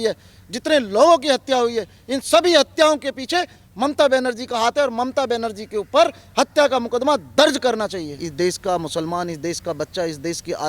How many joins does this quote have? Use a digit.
1